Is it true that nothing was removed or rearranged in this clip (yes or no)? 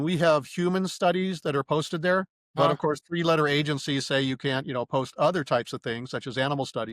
no